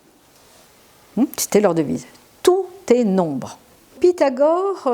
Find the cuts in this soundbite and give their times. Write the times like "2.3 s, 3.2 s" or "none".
3.9 s